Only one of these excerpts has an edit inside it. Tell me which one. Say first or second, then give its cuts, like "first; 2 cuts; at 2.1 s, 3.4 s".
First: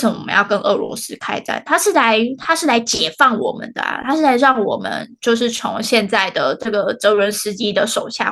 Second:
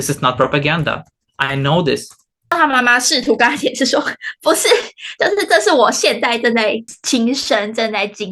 second; 2 cuts; at 2.5 s, 6.9 s